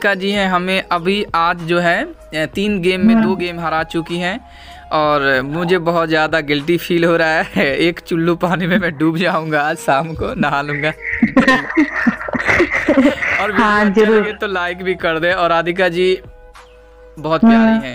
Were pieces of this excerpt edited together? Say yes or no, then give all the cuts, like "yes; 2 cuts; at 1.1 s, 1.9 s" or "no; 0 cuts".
no; 0 cuts